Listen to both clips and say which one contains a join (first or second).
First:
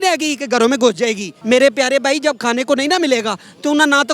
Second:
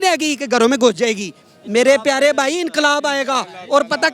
first